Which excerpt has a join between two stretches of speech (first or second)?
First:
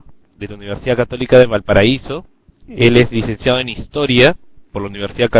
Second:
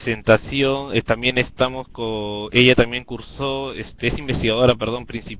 first